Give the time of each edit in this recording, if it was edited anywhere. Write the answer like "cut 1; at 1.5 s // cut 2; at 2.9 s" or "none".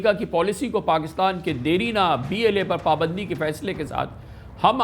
none